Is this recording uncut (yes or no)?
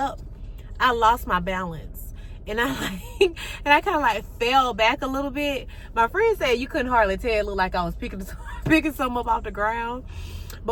yes